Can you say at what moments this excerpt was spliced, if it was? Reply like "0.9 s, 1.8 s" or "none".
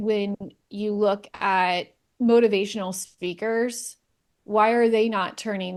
none